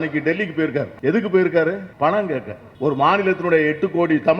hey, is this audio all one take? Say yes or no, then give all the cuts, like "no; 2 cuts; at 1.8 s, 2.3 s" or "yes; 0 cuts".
no; 3 cuts; at 0.9 s, 1.9 s, 2.6 s